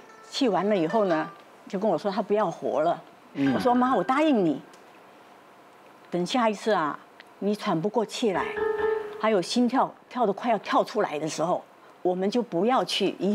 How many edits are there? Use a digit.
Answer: 1